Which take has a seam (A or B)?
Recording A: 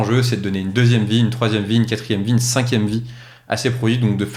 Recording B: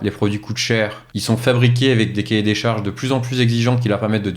B